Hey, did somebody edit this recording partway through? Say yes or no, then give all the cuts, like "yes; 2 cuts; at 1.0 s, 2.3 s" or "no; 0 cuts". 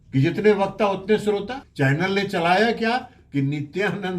yes; 1 cut; at 1.6 s